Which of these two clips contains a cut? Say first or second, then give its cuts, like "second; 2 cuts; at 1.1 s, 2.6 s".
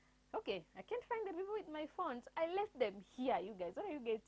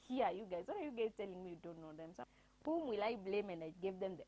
second; 1 cut; at 2.2 s